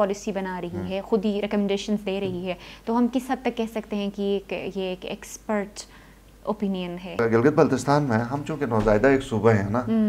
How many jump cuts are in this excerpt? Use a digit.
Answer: 1